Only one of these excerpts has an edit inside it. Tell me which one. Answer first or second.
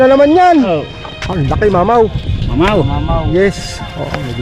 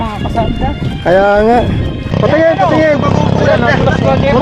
second